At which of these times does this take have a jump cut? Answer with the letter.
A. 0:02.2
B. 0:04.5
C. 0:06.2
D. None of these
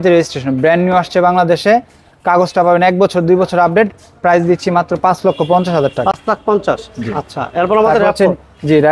D